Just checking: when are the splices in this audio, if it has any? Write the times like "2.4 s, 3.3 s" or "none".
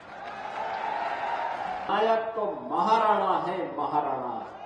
1.9 s